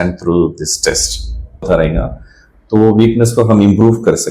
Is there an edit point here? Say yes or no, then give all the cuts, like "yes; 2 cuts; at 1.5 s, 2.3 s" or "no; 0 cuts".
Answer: yes; 1 cut; at 1.6 s